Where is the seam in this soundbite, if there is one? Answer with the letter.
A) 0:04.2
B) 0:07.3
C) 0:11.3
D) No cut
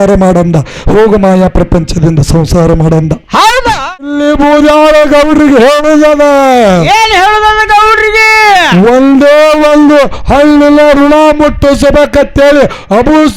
A